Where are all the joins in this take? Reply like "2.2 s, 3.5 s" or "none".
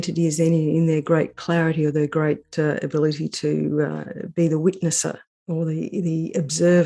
5.3 s